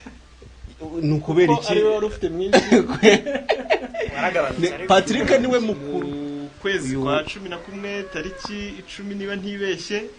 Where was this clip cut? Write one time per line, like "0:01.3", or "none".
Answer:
0:05.8

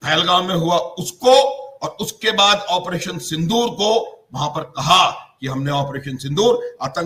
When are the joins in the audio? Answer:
none

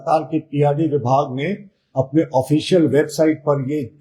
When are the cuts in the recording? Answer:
none

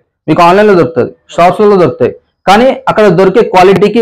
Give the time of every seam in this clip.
none

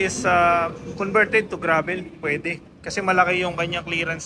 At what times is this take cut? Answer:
none

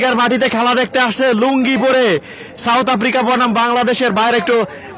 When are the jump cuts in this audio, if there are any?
none

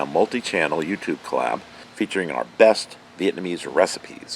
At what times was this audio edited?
0:01.8

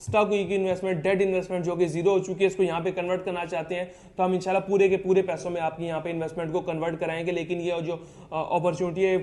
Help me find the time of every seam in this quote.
none

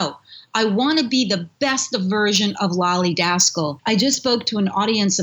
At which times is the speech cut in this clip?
0:03.8

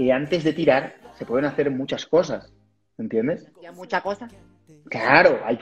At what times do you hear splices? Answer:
none

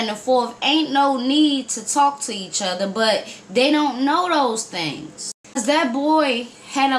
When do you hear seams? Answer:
0:05.4

